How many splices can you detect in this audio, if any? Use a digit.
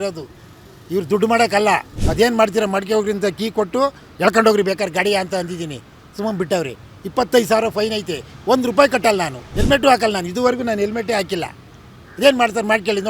2